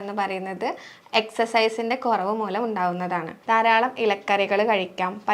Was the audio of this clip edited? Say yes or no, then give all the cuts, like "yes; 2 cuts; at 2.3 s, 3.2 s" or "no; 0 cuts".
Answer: yes; 1 cut; at 3.3 s